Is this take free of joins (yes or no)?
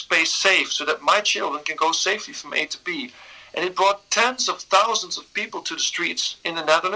yes